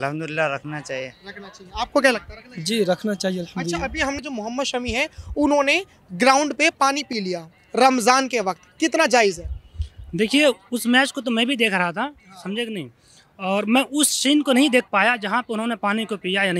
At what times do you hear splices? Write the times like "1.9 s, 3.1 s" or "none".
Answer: 4.2 s